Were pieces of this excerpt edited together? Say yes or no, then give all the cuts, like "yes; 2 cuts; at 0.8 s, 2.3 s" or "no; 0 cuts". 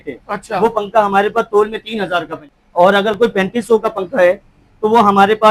yes; 1 cut; at 2.6 s